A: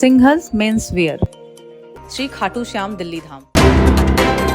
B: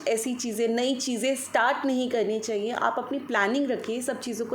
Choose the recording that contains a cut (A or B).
A